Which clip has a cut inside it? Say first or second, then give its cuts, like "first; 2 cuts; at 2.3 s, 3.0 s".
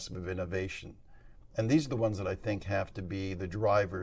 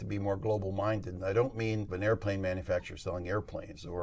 second; 1 cut; at 1.9 s